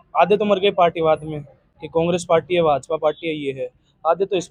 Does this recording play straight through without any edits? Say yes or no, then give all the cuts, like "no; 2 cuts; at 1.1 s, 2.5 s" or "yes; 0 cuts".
yes; 0 cuts